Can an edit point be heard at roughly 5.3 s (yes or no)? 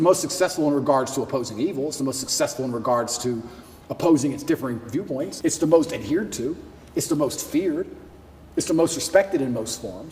yes